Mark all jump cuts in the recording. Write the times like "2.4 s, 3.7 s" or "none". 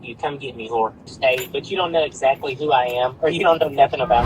1.0 s